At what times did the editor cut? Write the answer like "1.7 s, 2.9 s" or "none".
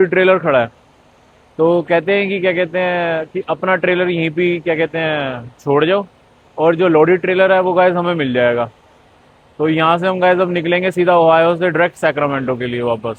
none